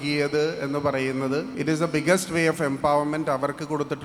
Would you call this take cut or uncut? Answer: cut